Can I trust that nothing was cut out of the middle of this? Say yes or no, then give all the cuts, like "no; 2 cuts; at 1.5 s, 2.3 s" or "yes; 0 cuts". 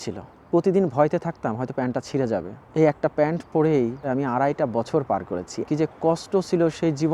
no; 2 cuts; at 4.1 s, 5.6 s